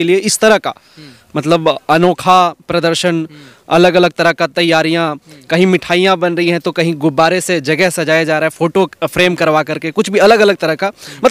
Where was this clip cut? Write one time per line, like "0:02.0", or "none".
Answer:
none